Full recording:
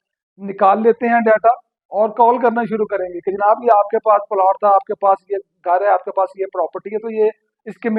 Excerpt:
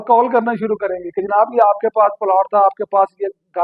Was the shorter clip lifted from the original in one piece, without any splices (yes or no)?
yes